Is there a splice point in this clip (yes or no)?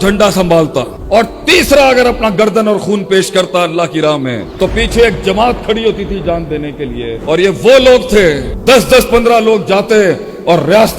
yes